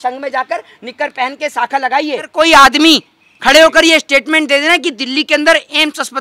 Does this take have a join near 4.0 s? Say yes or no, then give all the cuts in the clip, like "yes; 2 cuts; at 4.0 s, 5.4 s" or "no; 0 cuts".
no; 1 cut; at 2.3 s